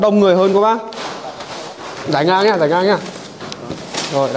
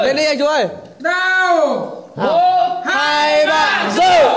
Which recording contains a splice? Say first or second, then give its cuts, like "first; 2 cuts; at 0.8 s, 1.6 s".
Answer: first; 1 cut; at 1.7 s